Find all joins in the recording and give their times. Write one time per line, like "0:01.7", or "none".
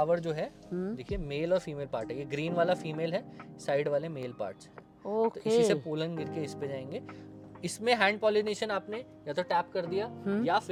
none